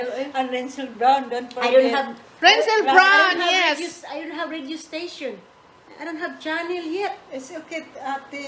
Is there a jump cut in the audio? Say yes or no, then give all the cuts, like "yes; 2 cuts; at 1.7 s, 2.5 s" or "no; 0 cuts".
no; 0 cuts